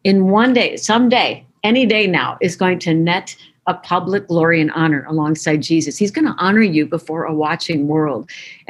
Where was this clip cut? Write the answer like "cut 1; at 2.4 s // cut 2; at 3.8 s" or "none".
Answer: none